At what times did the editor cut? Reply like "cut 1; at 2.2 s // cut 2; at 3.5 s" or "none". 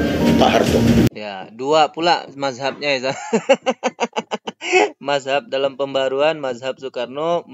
none